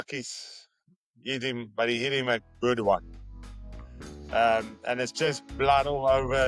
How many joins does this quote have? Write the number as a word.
zero